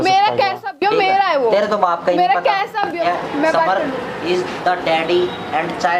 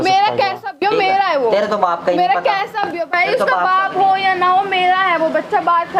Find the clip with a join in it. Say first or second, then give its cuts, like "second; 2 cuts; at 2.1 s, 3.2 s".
first; 1 cut; at 3.0 s